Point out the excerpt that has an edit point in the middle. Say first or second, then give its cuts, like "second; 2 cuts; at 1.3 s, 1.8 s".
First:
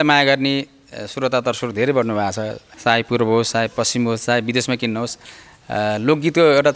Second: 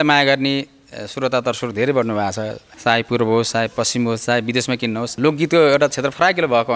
second; 1 cut; at 5.2 s